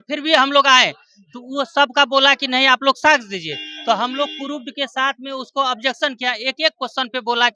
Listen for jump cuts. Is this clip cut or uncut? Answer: uncut